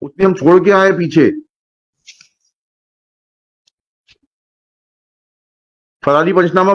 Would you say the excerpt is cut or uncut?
uncut